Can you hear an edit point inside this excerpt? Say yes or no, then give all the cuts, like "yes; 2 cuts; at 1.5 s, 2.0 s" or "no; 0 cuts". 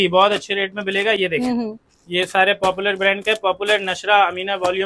no; 0 cuts